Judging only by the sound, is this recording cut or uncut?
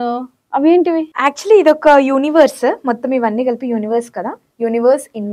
cut